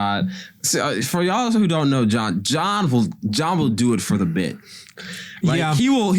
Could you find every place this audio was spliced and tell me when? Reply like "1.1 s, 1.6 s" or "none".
none